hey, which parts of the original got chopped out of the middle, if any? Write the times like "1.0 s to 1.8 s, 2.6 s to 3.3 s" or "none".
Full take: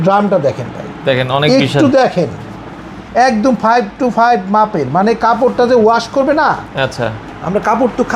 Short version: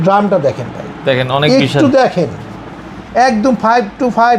none